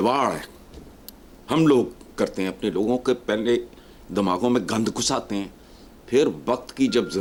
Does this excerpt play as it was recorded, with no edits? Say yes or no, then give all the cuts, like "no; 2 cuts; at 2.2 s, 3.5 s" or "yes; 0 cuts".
yes; 0 cuts